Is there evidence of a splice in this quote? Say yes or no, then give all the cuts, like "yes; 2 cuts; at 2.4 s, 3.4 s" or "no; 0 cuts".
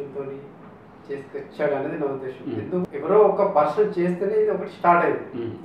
yes; 1 cut; at 2.8 s